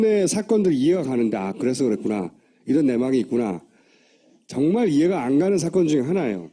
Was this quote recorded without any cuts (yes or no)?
yes